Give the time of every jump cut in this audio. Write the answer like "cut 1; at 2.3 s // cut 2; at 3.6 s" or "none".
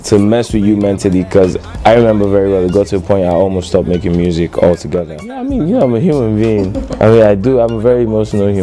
cut 1; at 5.4 s